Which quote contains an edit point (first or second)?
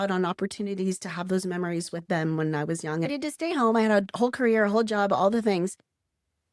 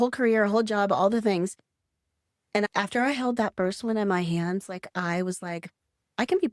first